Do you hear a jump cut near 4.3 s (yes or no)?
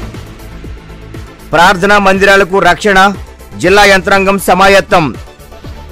no